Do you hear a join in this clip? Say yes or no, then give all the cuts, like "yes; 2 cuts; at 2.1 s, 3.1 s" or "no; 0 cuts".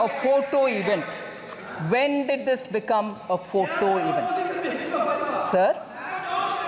no; 0 cuts